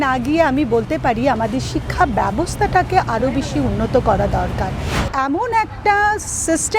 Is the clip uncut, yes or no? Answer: no